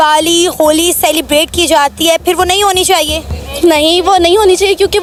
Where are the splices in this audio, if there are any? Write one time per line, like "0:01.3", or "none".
none